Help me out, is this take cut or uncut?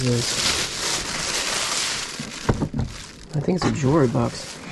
uncut